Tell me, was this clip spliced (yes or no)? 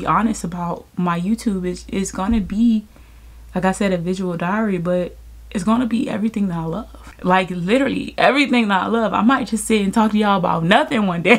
no